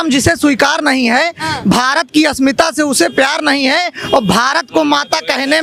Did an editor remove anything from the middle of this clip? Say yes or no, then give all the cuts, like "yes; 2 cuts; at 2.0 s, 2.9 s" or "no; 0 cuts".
no; 0 cuts